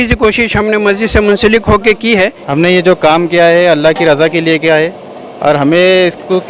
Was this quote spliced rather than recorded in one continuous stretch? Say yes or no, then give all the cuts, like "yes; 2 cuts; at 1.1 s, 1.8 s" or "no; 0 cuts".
yes; 1 cut; at 2.4 s